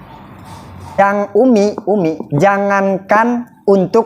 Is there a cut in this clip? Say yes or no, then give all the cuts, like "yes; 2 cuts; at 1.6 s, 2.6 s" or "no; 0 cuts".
yes; 1 cut; at 1.0 s